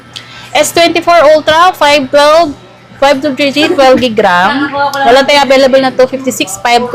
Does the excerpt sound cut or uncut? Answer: uncut